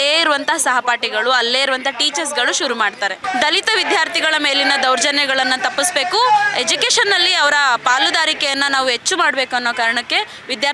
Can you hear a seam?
yes; 1 cut; at 3.2 s

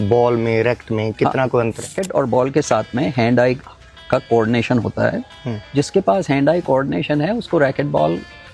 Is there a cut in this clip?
yes; 1 cut; at 1.9 s

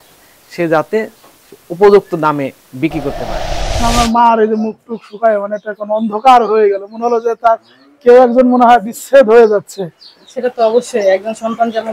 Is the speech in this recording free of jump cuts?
no; 1 cut; at 3.5 s

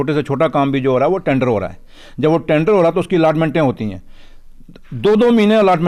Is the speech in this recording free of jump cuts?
yes; 0 cuts

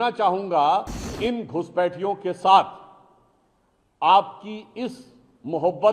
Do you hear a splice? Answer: yes; 1 cut; at 1.1 s

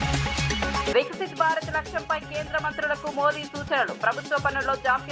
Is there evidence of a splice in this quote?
yes; 1 cut; at 0.9 s

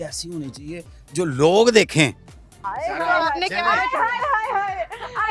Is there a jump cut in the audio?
no; 0 cuts

